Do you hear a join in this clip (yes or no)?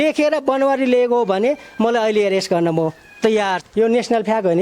yes